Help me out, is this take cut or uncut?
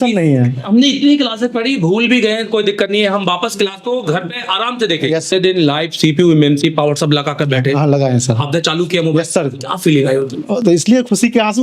cut